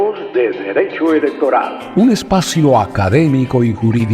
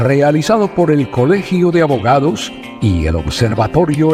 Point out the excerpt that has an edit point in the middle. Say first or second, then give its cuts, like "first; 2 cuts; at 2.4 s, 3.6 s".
first; 1 cut; at 1.8 s